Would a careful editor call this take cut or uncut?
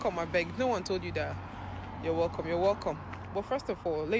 uncut